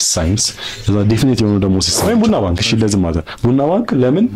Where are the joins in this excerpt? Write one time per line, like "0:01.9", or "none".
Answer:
0:01.9